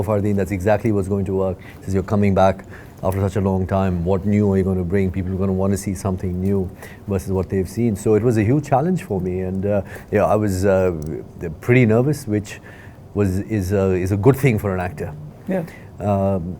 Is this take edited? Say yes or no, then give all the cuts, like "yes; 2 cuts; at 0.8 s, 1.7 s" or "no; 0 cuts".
no; 0 cuts